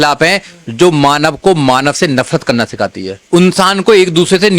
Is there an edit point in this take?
yes; 1 cut; at 3.2 s

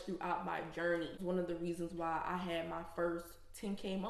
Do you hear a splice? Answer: yes; 1 cut; at 1.2 s

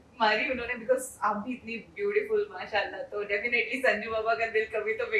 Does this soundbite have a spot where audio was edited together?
no; 0 cuts

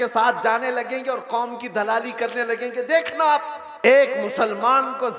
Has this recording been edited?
yes; 1 cut; at 3.9 s

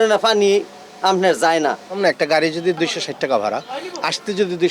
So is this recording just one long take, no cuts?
yes; 0 cuts

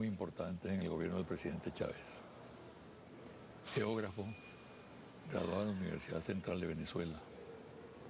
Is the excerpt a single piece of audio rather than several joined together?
yes; 0 cuts

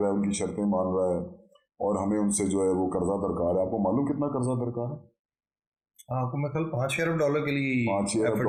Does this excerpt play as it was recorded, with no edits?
yes; 0 cuts

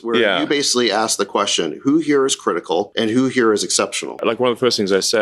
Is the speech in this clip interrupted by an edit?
yes; 2 cuts; at 2.9 s, 4.2 s

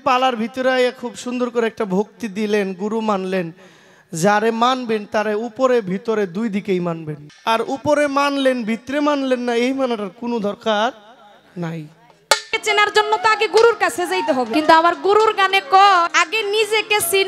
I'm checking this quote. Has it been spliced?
yes; 4 cuts; at 7.2 s, 12.5 s, 14.5 s, 16.2 s

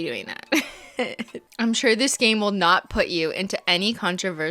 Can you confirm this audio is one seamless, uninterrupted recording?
no; 1 cut; at 1.5 s

